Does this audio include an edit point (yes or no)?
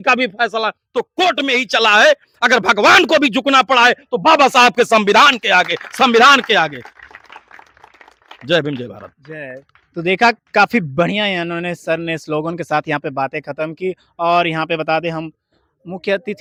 no